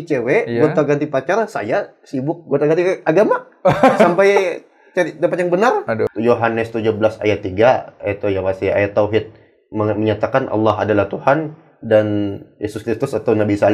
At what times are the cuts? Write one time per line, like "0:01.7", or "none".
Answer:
0:06.1